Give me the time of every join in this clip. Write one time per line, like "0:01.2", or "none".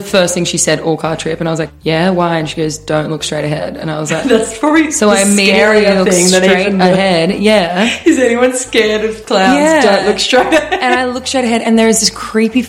none

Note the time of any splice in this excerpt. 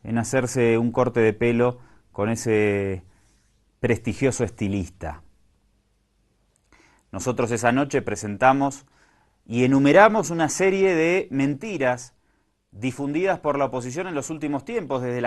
0:10.1

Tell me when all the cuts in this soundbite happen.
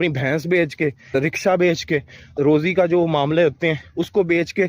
0:01.1
0:02.3

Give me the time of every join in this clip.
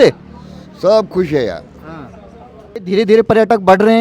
0:02.8

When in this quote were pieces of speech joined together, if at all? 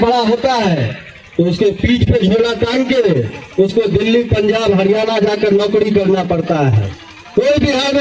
none

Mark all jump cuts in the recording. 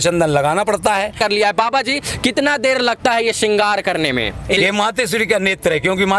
0:01.2
0:04.6

